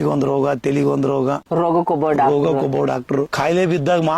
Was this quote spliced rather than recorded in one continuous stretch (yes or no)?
yes